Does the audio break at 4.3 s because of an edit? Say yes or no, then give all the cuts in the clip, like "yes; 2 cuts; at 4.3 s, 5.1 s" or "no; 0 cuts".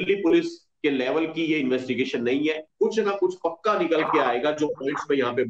no; 1 cut; at 2.7 s